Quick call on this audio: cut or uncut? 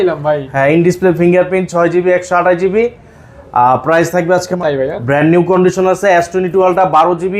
cut